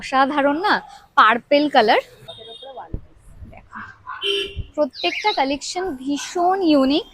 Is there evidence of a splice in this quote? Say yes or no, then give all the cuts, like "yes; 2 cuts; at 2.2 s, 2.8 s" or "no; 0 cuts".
yes; 1 cut; at 2.2 s